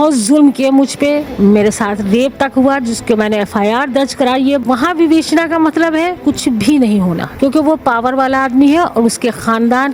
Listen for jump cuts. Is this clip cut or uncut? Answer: cut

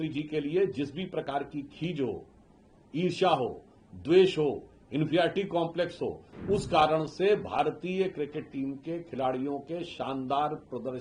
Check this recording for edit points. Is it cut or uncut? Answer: uncut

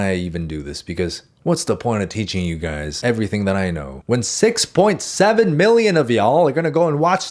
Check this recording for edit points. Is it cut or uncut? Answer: uncut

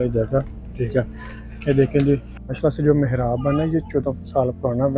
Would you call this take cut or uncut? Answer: cut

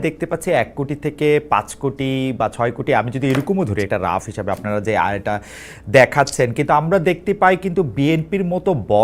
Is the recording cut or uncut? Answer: uncut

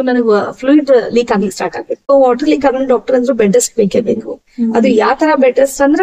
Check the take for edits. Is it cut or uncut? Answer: cut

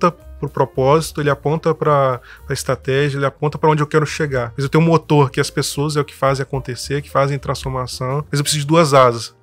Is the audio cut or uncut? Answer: cut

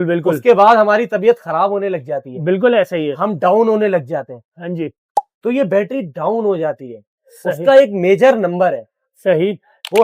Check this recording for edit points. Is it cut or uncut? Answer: uncut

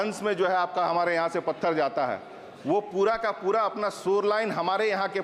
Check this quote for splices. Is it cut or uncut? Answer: uncut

